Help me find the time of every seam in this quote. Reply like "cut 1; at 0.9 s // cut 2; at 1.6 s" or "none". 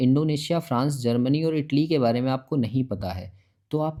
none